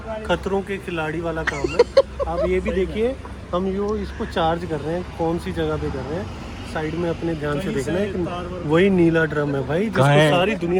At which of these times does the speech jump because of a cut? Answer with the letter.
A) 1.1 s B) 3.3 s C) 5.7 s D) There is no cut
D